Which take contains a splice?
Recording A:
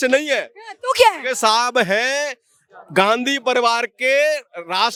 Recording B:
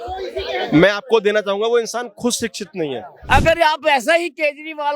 B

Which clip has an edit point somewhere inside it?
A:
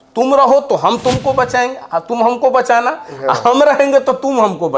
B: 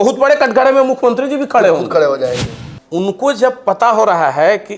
B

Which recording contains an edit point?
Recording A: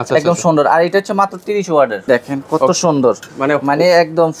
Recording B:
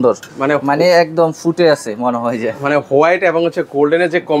A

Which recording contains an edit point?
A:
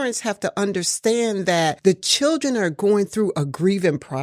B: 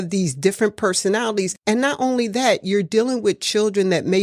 B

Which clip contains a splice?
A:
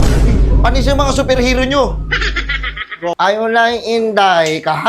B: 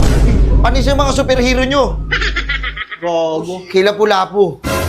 A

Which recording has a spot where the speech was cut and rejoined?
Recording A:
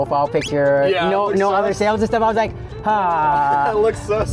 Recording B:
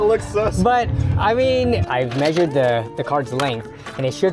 B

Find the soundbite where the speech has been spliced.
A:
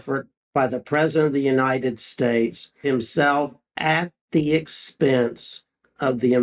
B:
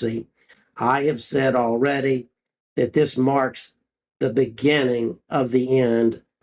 A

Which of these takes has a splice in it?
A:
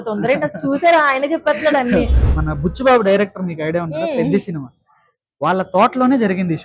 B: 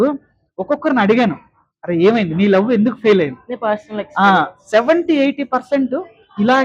A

